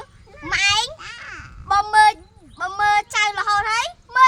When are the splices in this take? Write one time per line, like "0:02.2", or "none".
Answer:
none